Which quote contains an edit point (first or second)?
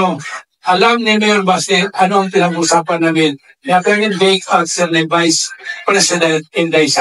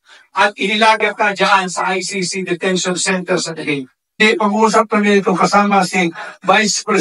second